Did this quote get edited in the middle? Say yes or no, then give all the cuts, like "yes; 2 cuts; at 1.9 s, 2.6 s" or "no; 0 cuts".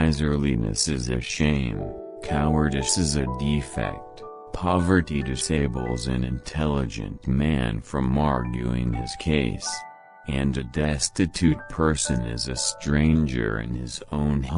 no; 0 cuts